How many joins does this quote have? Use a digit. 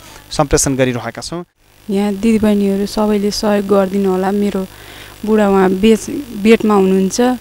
1